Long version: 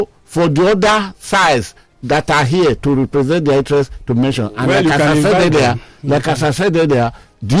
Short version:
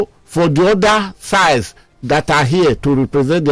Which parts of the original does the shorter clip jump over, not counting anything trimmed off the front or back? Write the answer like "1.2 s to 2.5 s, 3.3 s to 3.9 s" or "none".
none